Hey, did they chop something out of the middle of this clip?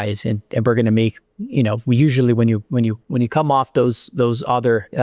yes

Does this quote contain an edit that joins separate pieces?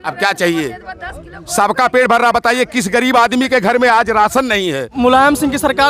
yes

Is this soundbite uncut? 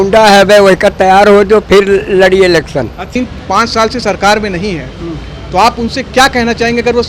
yes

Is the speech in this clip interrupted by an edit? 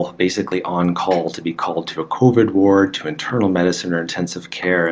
no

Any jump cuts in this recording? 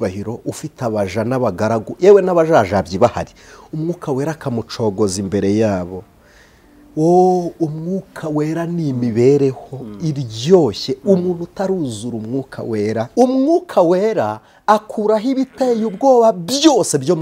yes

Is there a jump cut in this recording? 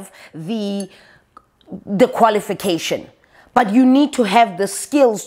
no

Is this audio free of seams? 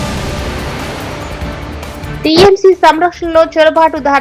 no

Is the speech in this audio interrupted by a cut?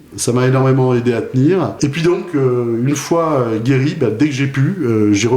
yes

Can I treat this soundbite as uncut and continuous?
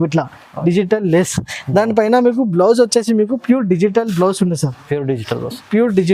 yes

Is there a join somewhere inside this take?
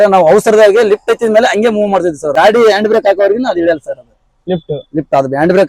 yes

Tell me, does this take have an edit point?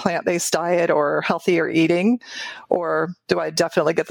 no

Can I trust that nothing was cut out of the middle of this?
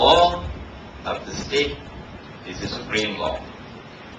yes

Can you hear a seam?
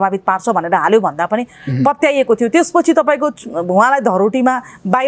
no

